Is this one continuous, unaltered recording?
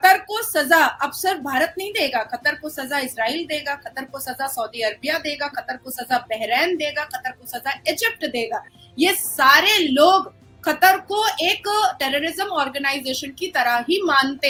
yes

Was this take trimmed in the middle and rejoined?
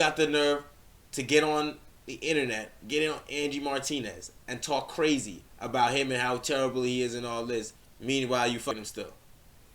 yes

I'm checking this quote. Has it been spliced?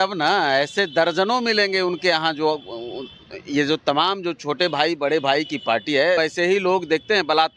yes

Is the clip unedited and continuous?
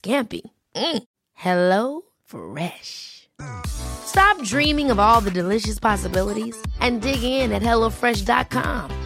yes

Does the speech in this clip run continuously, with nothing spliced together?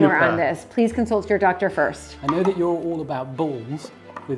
no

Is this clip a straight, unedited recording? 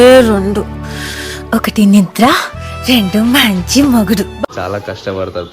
no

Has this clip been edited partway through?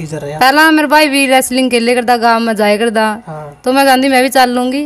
no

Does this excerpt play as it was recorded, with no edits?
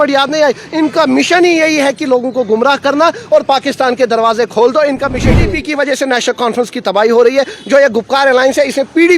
no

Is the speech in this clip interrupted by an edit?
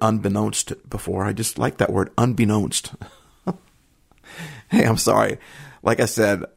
no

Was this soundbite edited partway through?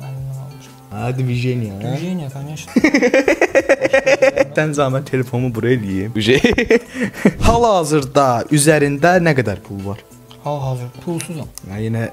no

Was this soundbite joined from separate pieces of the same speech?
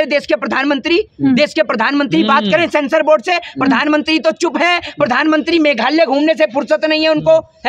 no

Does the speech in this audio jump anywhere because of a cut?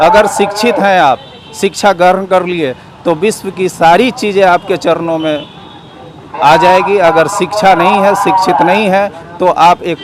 no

